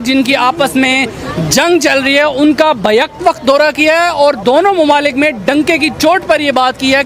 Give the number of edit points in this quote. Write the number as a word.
zero